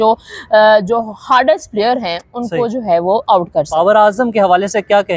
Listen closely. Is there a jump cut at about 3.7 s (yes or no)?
yes